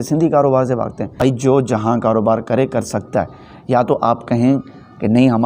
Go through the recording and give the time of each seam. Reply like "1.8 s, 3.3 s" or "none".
1.0 s